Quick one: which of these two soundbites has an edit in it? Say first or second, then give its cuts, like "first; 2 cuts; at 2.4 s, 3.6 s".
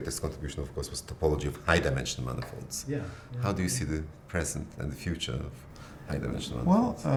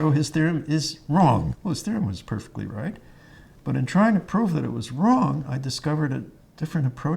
second; 1 cut; at 1.5 s